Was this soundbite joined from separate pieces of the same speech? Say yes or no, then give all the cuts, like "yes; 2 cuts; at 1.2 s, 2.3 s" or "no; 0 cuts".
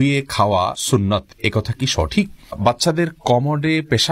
yes; 2 cuts; at 0.8 s, 2.6 s